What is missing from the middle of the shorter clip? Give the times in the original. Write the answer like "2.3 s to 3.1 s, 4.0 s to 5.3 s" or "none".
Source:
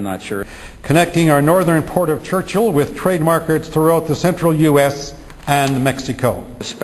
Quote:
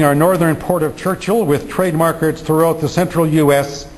none